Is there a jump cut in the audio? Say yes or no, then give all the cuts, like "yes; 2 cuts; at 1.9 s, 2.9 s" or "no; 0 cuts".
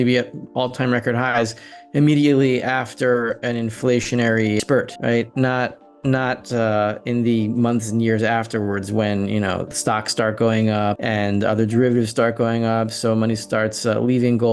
yes; 2 cuts; at 4.6 s, 11.0 s